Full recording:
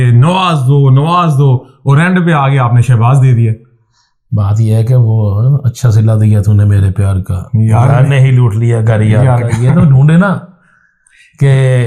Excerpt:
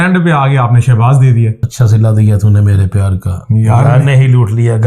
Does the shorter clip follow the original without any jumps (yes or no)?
no